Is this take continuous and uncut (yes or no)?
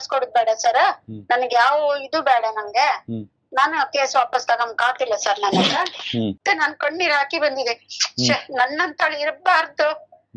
no